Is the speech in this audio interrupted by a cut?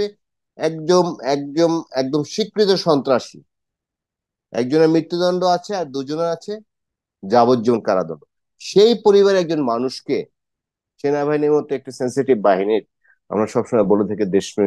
no; 0 cuts

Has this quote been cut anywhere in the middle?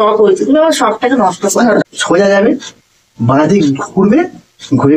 yes; 1 cut; at 1.8 s

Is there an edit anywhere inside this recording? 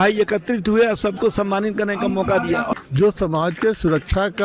yes; 1 cut; at 2.7 s

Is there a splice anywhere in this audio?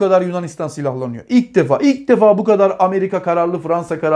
no; 0 cuts

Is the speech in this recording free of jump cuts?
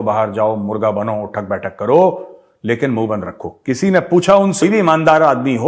no; 1 cut; at 4.6 s

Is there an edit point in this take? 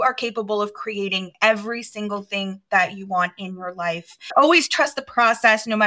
yes; 1 cut; at 4.3 s

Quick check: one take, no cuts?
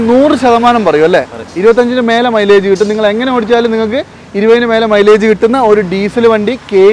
yes; 0 cuts

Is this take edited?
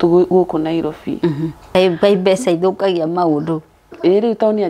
yes; 1 cut; at 1.6 s

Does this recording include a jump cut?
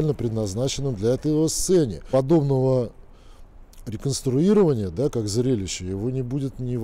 yes; 1 cut; at 2.0 s

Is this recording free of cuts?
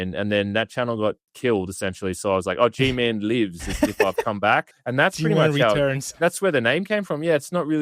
no; 2 cuts; at 1.3 s, 4.8 s

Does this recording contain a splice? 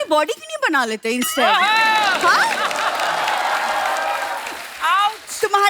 no; 0 cuts

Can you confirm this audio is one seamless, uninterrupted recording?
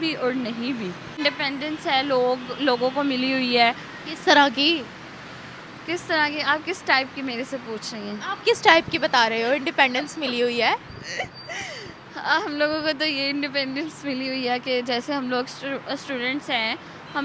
no; 1 cut; at 1.2 s

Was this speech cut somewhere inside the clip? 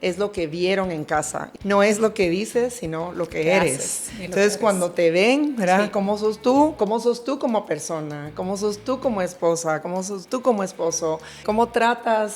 yes; 3 cuts; at 1.4 s, 6.7 s, 11.4 s

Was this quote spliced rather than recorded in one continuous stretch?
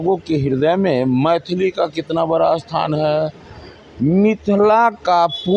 no; 0 cuts

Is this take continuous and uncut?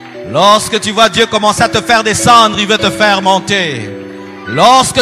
yes; 0 cuts

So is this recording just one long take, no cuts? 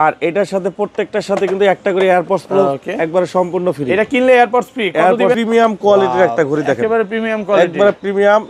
no; 1 cut; at 5.4 s

